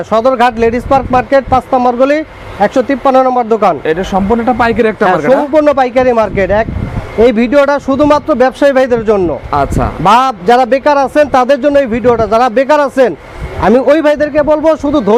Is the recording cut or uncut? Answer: uncut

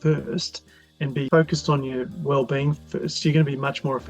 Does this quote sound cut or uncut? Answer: cut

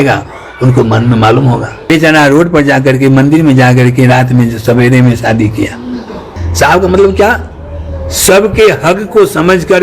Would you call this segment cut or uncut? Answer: cut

